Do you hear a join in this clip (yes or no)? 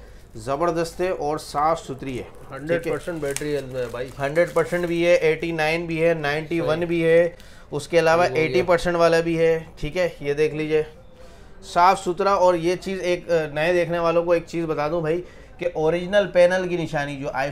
no